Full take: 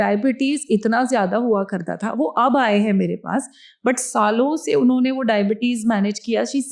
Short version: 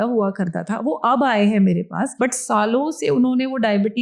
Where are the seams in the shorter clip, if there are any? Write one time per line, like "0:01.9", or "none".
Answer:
0:02.1